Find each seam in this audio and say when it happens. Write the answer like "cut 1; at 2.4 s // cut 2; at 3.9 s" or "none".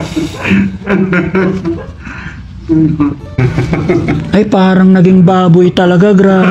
cut 1; at 3.4 s